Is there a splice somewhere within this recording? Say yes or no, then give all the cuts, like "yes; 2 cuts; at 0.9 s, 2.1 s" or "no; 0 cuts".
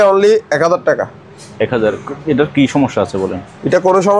no; 0 cuts